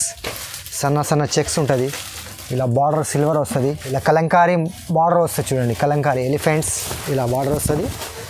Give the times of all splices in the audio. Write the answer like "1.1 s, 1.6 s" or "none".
3.8 s